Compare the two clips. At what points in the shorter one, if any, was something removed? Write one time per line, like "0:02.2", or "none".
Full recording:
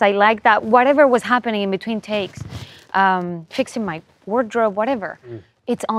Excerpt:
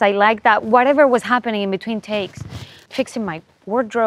0:02.8